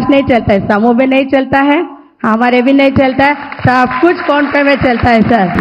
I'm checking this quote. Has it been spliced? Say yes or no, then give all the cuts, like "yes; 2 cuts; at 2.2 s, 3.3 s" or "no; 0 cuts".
no; 0 cuts